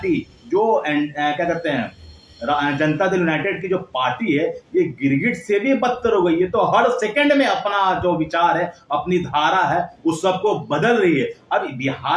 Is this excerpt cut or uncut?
uncut